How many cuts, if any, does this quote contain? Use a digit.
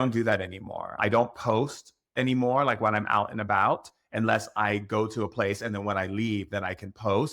1